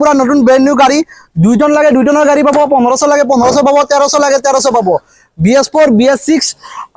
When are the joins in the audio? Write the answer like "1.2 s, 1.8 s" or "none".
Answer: none